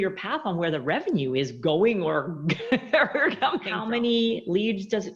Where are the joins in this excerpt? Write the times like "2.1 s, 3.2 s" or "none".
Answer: 3.7 s